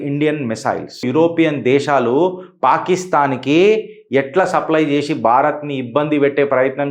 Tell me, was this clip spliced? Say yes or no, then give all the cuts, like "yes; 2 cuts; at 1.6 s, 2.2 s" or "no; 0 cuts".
yes; 1 cut; at 1.1 s